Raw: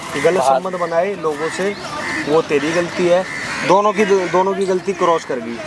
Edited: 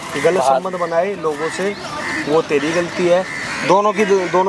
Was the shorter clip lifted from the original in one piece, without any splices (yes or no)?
yes